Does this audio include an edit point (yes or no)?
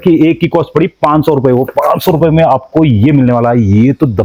no